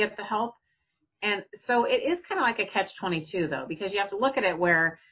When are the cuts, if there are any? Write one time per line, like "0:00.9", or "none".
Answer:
none